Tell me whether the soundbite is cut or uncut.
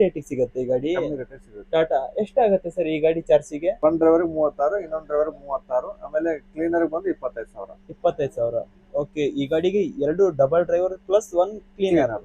cut